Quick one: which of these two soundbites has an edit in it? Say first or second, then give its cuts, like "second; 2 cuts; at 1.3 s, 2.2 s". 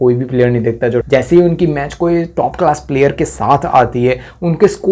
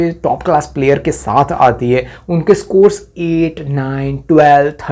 first; 1 cut; at 1.0 s